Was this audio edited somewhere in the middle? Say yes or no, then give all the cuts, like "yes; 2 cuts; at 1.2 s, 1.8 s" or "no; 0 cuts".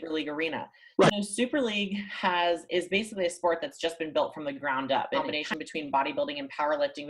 yes; 2 cuts; at 1.1 s, 5.2 s